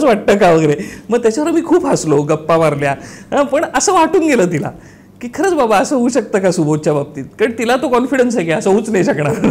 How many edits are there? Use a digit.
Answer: 0